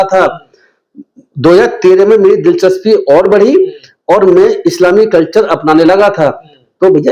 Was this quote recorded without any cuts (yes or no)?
yes